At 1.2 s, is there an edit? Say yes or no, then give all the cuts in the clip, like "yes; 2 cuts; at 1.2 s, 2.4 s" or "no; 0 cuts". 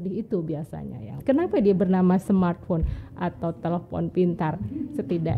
yes; 1 cut; at 1.2 s